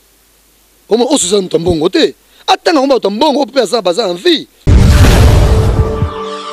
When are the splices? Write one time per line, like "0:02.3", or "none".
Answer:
0:04.5